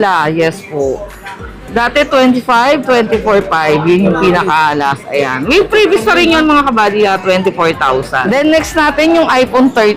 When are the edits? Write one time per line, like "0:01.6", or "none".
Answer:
0:08.2

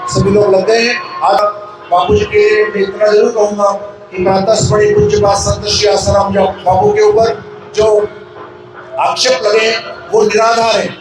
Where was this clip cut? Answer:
0:01.4

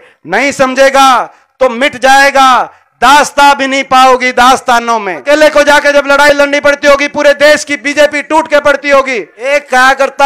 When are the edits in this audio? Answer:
0:05.2
0:09.3

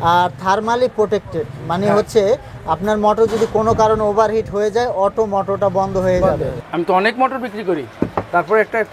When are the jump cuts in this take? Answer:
0:06.6

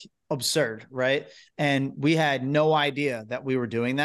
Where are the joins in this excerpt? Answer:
none

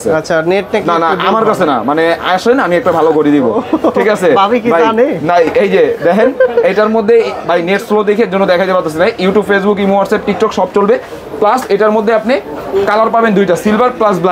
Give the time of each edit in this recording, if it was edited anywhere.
none

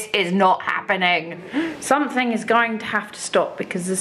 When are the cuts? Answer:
0:01.5

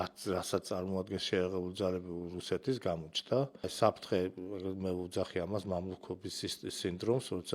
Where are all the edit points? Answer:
0:03.7

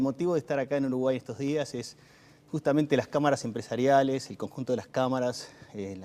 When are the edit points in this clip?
0:05.1

